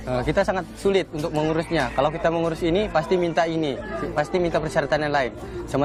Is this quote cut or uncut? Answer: uncut